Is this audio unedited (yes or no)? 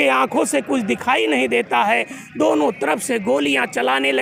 yes